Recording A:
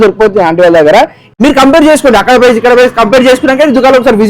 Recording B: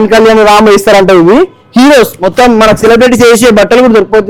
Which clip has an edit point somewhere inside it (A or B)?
A